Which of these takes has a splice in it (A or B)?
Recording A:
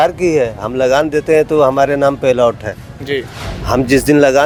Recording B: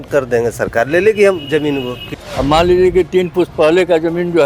B